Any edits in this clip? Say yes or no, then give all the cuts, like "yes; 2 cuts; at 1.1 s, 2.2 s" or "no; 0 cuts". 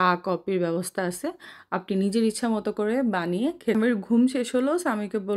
yes; 1 cut; at 3.8 s